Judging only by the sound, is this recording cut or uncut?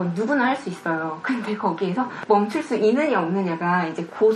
uncut